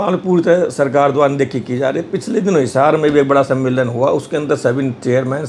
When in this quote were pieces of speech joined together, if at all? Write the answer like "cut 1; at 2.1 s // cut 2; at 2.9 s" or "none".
none

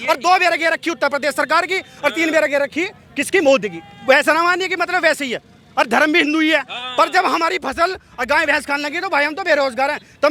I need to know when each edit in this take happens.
none

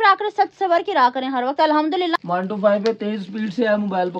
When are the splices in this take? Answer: cut 1; at 2.1 s

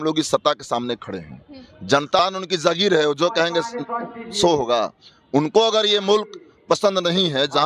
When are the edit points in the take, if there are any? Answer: cut 1; at 2.2 s

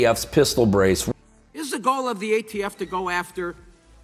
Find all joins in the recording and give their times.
cut 1; at 1.2 s

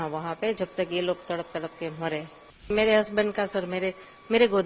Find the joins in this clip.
cut 1; at 2.7 s

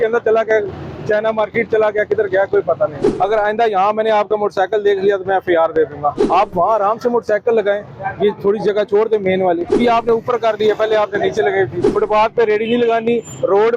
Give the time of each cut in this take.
cut 1; at 3.0 s // cut 2; at 6.3 s // cut 3; at 9.6 s // cut 4; at 11.8 s

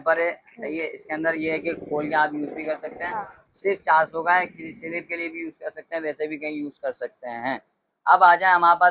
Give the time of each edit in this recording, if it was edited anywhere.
none

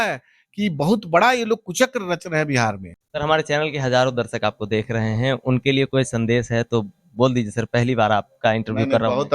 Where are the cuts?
cut 1; at 3.1 s

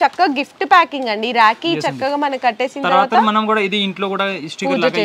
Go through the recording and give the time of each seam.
none

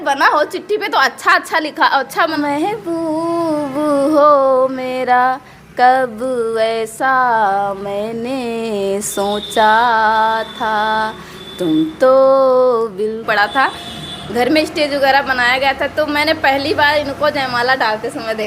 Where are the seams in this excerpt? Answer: cut 1; at 2.3 s // cut 2; at 13.2 s

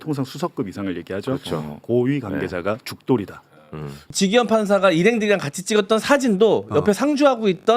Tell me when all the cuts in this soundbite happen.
cut 1; at 4.0 s

